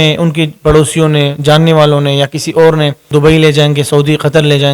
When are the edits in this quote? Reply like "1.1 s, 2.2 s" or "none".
3.0 s